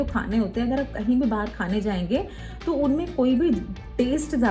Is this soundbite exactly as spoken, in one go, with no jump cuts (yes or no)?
yes